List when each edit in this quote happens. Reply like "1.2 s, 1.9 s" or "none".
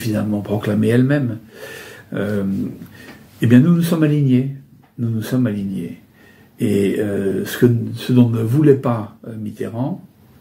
none